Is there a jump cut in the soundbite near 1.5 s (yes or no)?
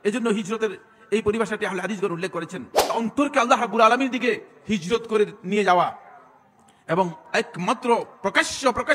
no